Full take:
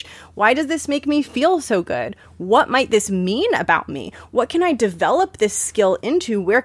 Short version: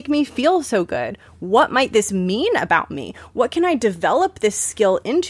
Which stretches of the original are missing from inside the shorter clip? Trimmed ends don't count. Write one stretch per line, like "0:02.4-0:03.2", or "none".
none